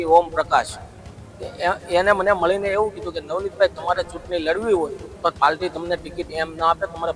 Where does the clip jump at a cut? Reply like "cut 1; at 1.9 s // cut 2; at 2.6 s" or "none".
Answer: none